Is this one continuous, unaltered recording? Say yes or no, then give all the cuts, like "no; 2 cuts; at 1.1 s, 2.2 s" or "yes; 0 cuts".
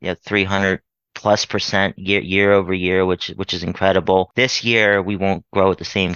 yes; 0 cuts